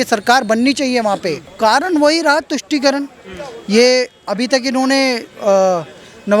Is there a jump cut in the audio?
yes; 1 cut; at 1.5 s

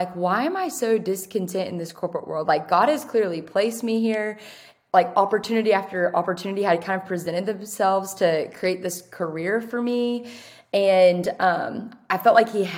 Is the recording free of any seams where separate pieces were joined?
yes; 0 cuts

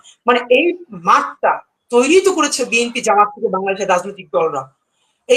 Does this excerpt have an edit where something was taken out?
no; 0 cuts

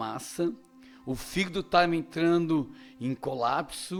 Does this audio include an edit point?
no; 0 cuts

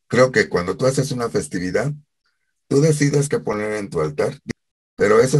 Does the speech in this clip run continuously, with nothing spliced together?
no; 1 cut; at 4.4 s

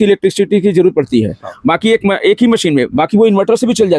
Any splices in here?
no; 0 cuts

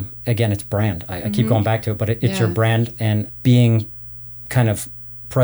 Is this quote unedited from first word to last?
no; 1 cut; at 3.3 s

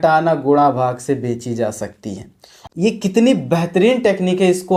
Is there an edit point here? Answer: no; 0 cuts

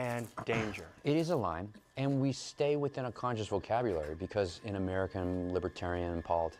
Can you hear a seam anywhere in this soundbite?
no; 0 cuts

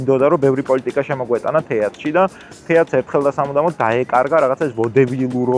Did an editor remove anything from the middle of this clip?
no; 0 cuts

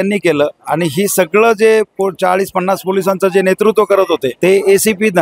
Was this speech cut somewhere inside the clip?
yes; 1 cut; at 4.3 s

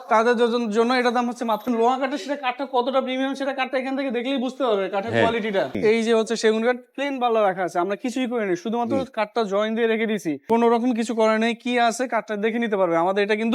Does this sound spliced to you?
yes; 3 cuts; at 1.7 s, 5.8 s, 10.4 s

